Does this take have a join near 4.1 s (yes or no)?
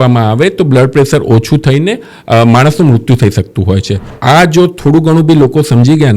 yes